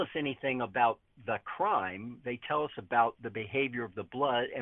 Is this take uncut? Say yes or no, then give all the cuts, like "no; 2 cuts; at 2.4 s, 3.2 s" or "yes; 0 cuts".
yes; 0 cuts